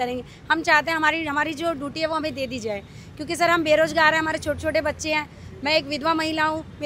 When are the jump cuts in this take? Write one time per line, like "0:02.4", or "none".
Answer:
none